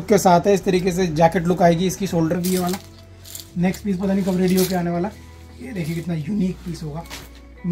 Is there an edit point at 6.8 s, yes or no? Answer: no